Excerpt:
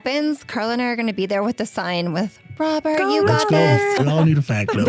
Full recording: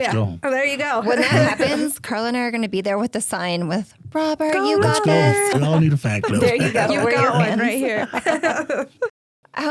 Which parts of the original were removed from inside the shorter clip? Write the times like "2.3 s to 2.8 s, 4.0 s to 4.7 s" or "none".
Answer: none